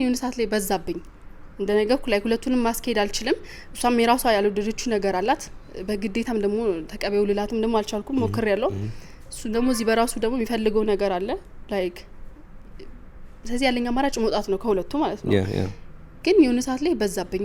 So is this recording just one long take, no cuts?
yes; 0 cuts

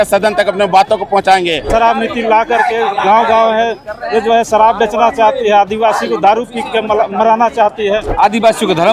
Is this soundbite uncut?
no; 2 cuts; at 1.7 s, 8.1 s

